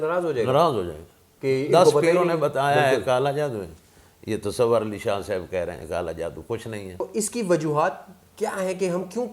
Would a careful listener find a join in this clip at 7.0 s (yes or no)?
yes